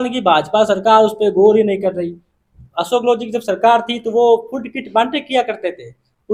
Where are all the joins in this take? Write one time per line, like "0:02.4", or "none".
none